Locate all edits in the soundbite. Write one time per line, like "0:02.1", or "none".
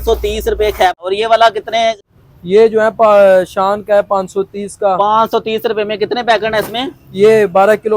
0:00.9
0:02.0

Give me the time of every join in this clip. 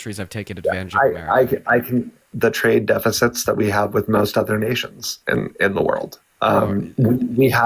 0:02.3

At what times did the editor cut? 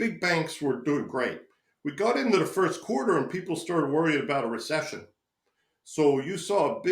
none

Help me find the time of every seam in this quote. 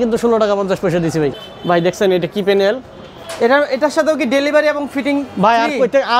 0:01.3
0:03.2

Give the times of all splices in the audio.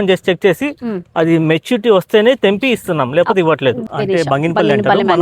0:03.8

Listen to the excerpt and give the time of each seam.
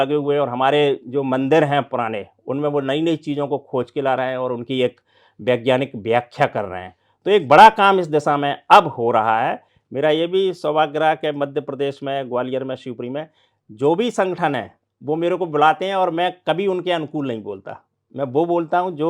0:09.7

